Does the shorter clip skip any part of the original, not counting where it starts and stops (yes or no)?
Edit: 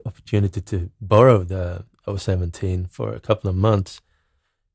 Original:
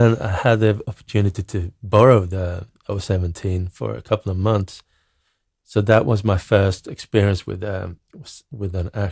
no